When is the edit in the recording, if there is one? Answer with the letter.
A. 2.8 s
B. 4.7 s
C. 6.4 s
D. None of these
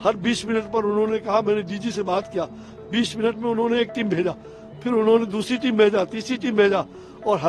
D